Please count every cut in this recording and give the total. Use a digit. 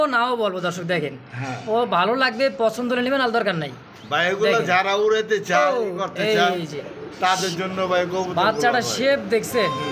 0